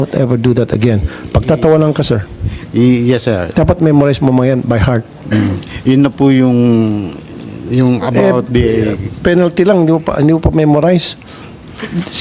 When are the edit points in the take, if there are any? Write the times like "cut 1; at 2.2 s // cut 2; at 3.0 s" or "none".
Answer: none